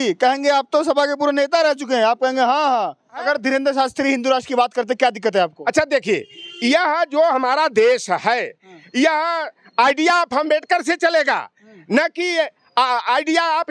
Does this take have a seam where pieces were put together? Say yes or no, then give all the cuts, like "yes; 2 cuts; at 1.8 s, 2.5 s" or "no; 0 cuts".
yes; 1 cut; at 3.2 s